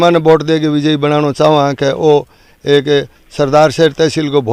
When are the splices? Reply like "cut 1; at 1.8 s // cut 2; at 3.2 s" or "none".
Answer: none